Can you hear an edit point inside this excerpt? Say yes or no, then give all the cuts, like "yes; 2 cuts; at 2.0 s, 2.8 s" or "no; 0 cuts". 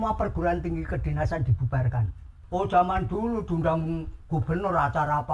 yes; 1 cut; at 2.3 s